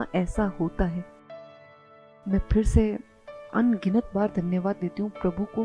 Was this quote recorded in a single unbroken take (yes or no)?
no